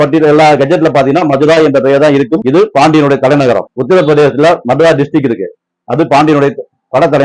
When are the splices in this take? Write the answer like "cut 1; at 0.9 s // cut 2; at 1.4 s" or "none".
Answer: cut 1; at 3.6 s